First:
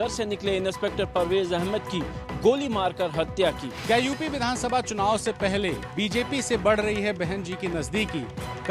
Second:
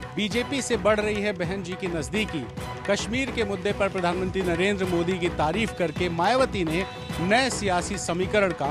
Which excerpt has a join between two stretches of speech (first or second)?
first